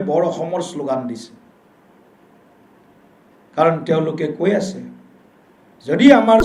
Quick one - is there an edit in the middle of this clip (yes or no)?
no